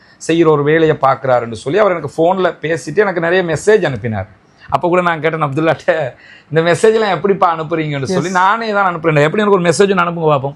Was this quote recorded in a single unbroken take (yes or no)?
yes